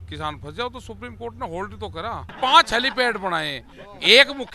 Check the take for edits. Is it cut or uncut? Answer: cut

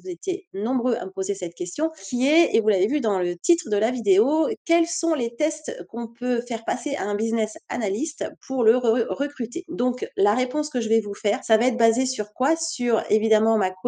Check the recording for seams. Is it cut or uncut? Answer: cut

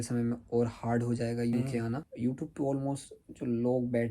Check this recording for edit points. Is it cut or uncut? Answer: cut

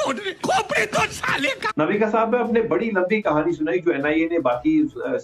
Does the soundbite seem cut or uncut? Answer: uncut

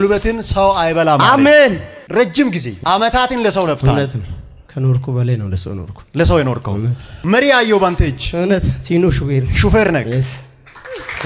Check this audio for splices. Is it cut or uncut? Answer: cut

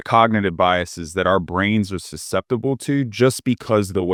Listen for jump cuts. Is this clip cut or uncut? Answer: uncut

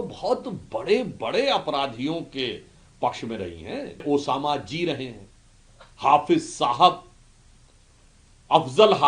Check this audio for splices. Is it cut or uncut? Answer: cut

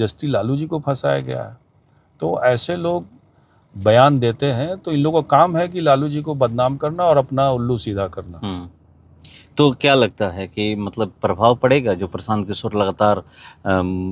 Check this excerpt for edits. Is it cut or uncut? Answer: uncut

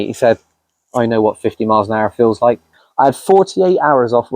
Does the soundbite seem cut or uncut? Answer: cut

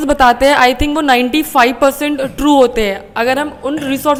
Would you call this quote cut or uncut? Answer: uncut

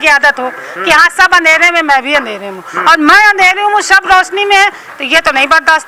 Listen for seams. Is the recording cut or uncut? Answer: uncut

